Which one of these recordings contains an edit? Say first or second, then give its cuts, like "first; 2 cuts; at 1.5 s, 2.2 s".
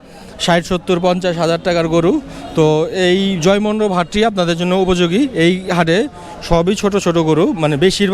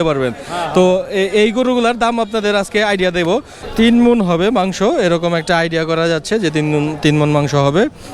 second; 1 cut; at 3.6 s